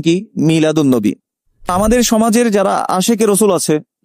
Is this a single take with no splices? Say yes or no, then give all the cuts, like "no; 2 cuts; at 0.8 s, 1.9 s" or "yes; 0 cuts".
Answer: no; 1 cut; at 1.7 s